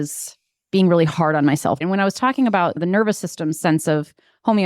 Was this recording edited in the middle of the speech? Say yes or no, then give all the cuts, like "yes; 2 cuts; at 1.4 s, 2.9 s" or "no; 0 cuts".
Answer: yes; 2 cuts; at 1.8 s, 2.8 s